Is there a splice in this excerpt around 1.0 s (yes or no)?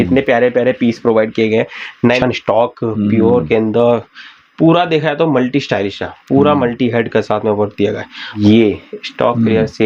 no